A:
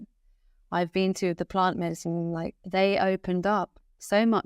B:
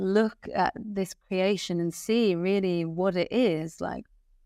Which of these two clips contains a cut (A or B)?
A